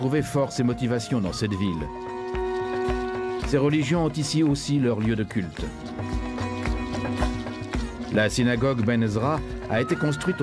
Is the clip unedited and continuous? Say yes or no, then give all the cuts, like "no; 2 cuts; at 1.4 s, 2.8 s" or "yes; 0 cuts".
no; 1 cut; at 6.7 s